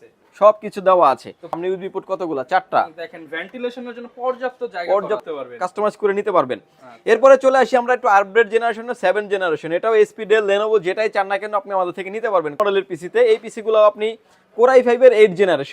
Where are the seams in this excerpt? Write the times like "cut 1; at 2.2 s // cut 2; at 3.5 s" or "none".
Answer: cut 1; at 1.6 s // cut 2; at 5.3 s // cut 3; at 12.6 s